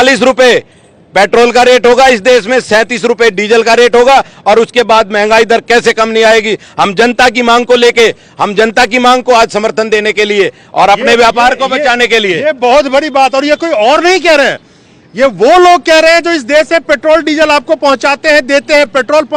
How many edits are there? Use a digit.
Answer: 0